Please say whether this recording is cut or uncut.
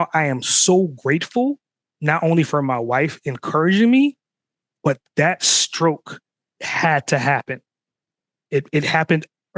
uncut